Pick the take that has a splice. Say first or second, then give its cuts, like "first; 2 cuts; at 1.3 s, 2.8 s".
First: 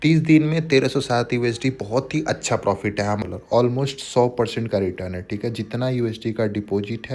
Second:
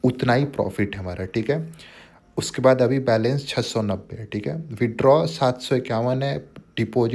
first; 1 cut; at 3.2 s